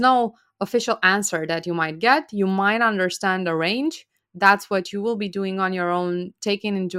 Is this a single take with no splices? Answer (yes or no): yes